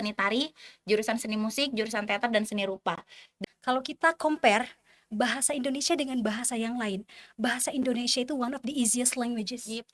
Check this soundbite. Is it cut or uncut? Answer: cut